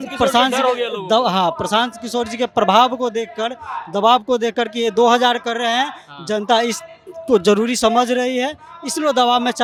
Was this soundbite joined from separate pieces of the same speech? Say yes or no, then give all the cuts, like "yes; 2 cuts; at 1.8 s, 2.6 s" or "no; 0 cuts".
no; 0 cuts